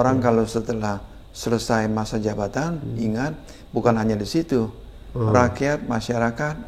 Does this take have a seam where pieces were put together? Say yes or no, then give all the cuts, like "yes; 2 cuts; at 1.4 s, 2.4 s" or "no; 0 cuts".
no; 0 cuts